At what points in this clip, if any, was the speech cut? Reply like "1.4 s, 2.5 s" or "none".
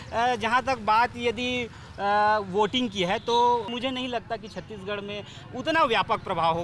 3.7 s